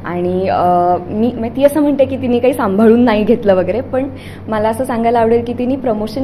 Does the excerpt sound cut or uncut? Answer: uncut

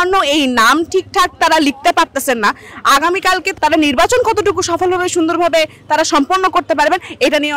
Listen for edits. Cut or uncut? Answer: cut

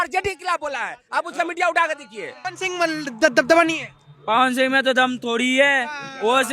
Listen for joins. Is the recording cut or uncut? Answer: cut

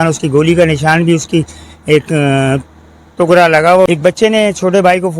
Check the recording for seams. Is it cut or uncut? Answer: cut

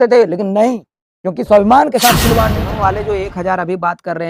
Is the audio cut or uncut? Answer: cut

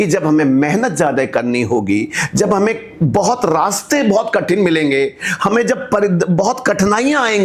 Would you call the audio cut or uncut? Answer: uncut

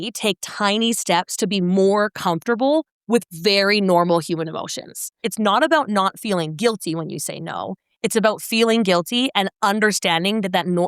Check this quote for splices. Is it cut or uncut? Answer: cut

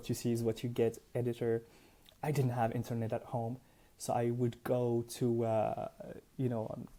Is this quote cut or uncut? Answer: uncut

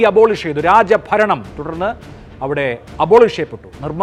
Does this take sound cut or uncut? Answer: uncut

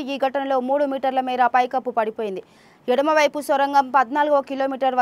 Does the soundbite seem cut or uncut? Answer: uncut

